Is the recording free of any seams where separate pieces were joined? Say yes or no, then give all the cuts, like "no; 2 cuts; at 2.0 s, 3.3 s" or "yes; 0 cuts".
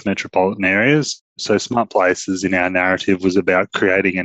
no; 1 cut; at 1.3 s